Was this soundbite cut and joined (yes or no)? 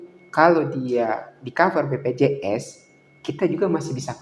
no